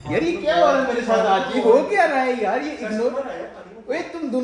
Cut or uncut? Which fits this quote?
uncut